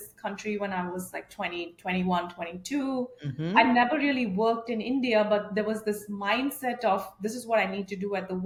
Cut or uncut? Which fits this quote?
uncut